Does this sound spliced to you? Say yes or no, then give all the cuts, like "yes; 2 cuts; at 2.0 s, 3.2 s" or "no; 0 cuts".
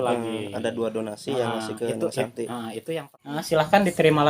yes; 1 cut; at 3.0 s